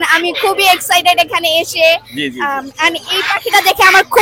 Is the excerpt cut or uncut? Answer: uncut